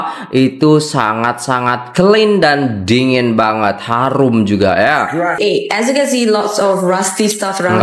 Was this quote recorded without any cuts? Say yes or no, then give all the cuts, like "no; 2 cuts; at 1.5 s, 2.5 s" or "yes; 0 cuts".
no; 1 cut; at 5.4 s